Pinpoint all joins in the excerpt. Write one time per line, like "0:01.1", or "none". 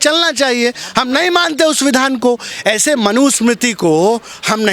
0:02.5